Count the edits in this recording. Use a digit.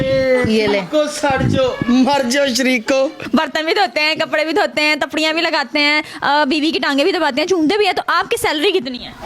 1